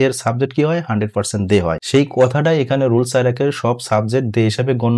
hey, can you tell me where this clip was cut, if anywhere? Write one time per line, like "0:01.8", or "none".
0:01.8